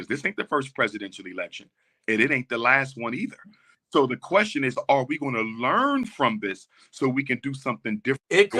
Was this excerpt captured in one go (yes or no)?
yes